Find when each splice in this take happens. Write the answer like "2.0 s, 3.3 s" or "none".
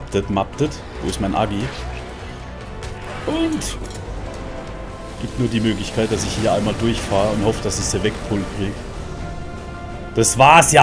5.1 s